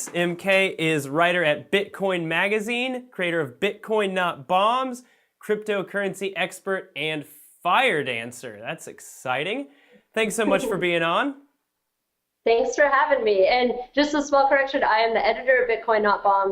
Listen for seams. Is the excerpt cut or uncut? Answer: cut